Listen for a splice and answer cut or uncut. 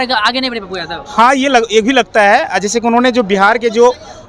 uncut